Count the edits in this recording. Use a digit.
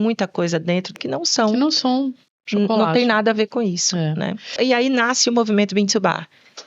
2